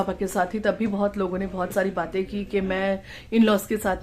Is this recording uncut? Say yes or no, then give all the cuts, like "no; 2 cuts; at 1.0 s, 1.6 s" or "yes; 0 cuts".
yes; 0 cuts